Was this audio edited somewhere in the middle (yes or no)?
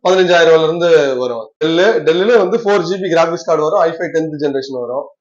yes